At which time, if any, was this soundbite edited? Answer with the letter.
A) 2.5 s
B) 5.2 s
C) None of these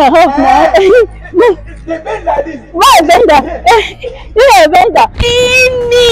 B